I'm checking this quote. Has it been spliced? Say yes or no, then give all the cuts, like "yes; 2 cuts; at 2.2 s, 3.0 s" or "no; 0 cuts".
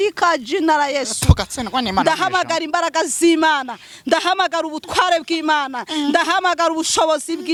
no; 0 cuts